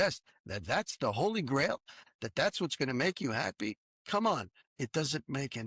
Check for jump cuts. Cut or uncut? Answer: cut